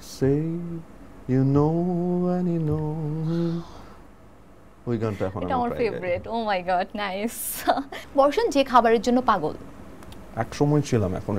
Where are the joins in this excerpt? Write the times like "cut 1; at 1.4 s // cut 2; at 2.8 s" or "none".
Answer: cut 1; at 8.0 s